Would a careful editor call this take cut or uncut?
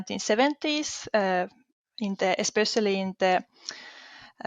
uncut